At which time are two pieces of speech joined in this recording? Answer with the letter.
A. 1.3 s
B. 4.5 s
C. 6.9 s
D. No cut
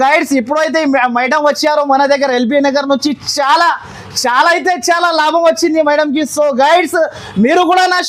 D